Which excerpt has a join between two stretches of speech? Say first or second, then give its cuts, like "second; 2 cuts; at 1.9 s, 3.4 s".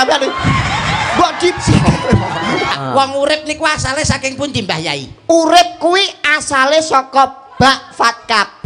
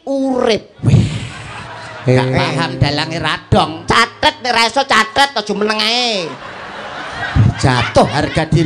first; 1 cut; at 2.7 s